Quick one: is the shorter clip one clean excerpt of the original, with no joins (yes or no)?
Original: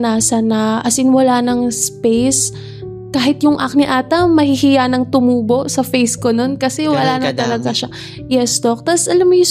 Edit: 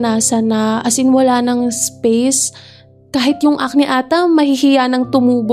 yes